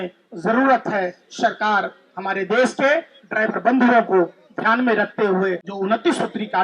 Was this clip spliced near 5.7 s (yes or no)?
yes